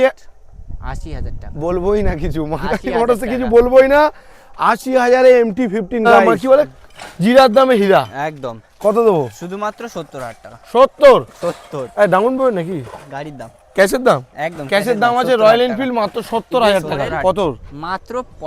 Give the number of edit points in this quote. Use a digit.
2